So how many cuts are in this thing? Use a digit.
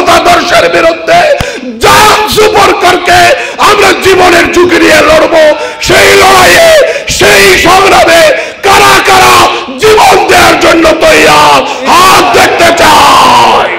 0